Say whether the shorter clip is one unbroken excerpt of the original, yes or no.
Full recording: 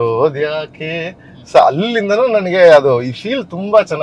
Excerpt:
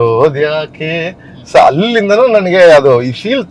yes